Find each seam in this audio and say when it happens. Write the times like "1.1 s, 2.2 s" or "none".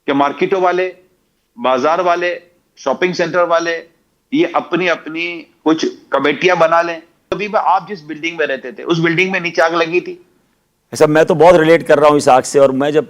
7.4 s